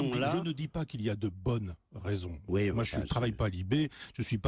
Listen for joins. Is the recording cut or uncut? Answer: uncut